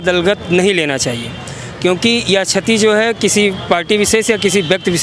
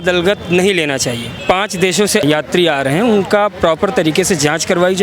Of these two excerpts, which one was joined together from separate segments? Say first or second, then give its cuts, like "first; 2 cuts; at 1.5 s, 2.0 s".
second; 2 cuts; at 1.4 s, 2.2 s